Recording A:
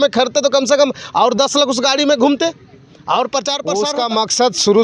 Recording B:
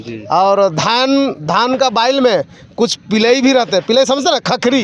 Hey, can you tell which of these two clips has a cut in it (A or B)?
A